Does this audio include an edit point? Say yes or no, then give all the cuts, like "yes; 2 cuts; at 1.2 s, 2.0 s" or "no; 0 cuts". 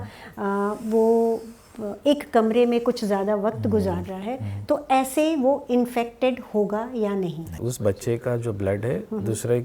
yes; 1 cut; at 7.7 s